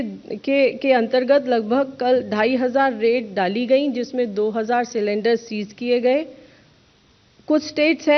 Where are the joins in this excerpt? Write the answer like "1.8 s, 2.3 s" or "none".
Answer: none